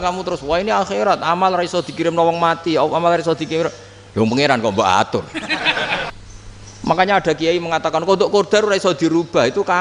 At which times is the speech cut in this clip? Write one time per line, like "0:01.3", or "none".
0:06.1